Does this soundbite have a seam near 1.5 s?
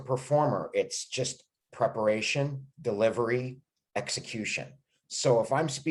no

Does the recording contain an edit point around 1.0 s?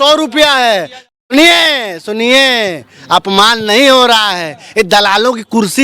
yes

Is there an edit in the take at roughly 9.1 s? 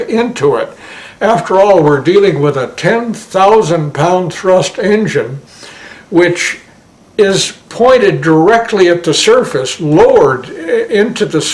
no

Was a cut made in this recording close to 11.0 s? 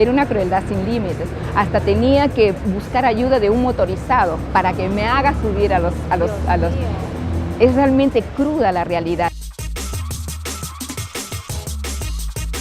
no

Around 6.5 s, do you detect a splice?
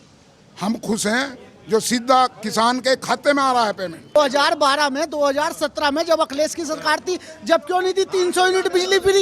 no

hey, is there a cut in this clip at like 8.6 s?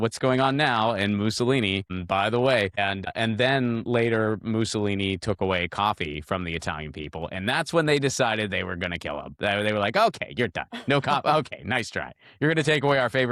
no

